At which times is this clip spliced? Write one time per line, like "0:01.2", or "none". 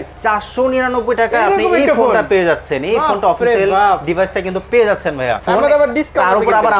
0:05.4